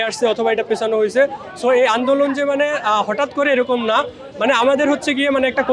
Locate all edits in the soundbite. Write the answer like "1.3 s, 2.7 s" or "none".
none

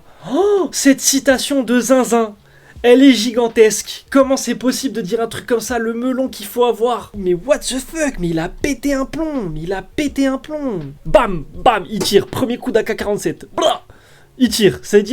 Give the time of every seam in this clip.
7.1 s, 10.9 s

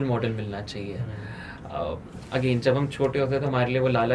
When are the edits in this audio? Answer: none

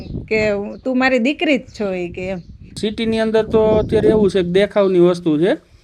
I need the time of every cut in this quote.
2.7 s

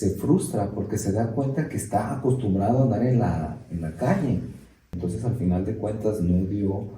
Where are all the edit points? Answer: 4.9 s

